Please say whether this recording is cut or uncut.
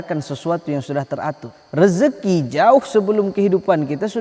cut